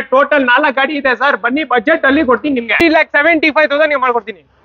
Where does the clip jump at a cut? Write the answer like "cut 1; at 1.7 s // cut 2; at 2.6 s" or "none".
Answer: cut 1; at 2.8 s